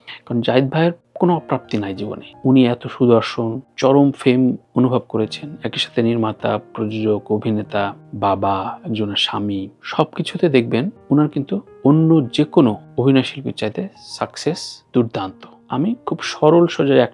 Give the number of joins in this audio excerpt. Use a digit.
1